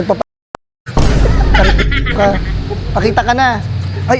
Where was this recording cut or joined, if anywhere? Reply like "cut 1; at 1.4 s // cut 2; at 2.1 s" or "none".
none